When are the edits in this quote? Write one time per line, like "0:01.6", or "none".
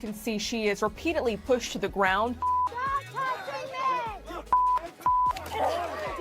0:02.4